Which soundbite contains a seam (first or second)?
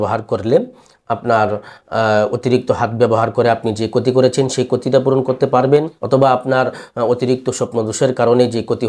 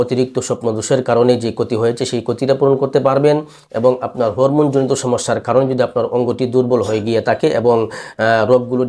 first